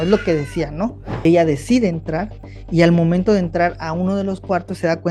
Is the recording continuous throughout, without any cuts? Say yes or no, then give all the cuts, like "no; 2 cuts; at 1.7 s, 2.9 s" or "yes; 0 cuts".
no; 1 cut; at 1.2 s